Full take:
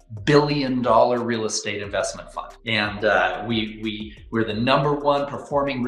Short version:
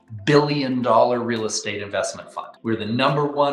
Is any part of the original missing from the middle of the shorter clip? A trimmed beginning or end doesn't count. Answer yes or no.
yes